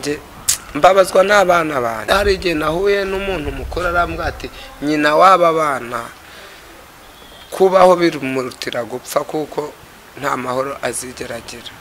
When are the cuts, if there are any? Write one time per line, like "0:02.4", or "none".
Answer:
0:02.0